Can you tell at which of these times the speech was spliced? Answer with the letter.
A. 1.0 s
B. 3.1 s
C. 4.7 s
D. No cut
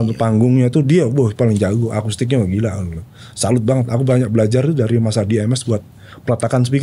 D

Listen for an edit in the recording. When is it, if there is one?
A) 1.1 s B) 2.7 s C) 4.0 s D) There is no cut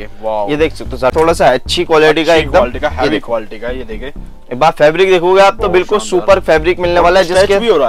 A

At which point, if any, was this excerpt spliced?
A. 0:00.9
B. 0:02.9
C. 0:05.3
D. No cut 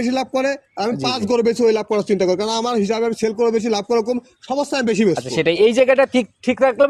D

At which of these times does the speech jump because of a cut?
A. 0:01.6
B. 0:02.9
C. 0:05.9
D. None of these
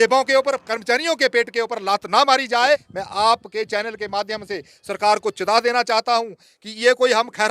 B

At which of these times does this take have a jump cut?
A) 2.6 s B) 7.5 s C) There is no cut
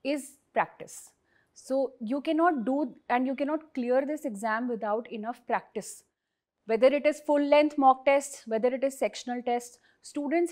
C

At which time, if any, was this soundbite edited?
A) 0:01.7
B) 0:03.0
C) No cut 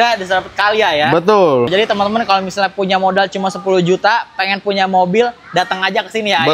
A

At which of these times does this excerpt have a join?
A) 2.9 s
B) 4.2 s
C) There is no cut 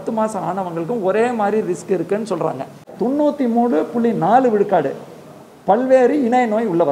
A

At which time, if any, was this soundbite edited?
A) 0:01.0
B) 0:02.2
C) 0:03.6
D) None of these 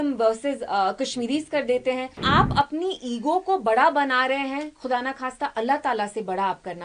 B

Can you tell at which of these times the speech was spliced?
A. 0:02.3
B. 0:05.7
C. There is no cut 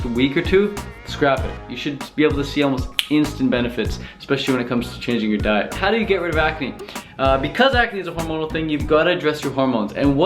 B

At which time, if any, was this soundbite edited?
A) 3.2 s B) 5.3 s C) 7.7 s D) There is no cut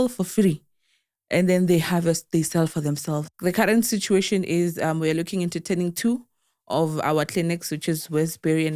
A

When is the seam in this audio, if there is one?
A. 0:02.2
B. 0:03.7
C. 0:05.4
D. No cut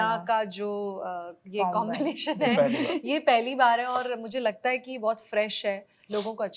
D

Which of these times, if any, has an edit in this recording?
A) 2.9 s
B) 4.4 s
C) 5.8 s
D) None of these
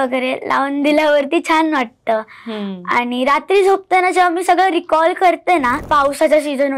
C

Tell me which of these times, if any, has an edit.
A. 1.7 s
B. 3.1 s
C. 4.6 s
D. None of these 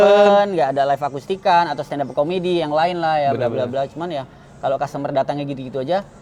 D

